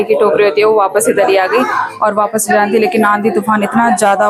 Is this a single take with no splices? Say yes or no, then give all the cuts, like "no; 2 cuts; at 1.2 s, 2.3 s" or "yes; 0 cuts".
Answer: yes; 0 cuts